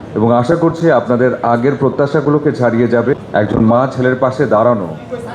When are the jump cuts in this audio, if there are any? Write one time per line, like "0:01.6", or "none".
0:03.1